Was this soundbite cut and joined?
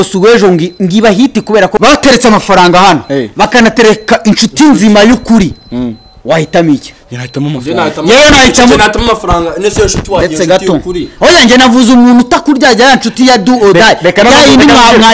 yes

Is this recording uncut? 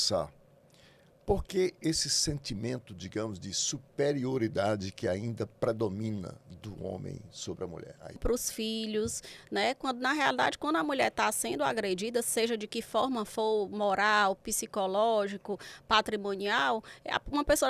no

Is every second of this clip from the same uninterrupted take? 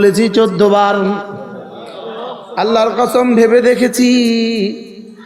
yes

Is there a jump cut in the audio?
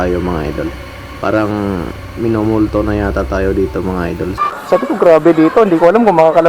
yes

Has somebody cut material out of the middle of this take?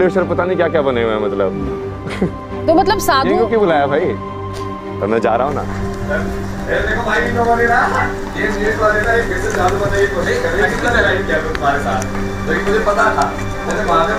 no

